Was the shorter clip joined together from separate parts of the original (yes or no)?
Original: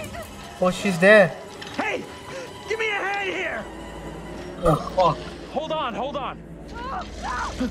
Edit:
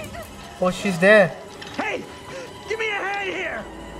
no